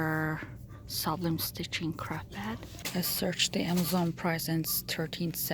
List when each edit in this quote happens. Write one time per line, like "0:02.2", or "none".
0:02.7